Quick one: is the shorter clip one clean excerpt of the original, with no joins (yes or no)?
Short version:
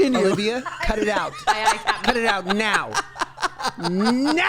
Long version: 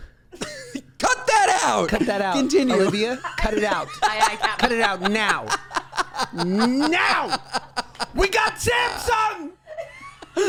yes